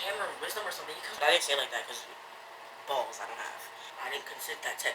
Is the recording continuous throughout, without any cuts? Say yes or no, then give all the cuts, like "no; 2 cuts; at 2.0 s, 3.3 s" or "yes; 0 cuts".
no; 2 cuts; at 1.1 s, 3.8 s